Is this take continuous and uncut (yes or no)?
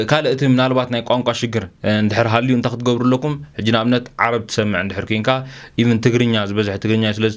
yes